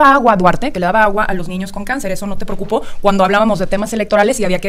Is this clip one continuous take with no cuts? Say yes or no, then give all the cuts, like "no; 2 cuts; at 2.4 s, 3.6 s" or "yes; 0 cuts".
yes; 0 cuts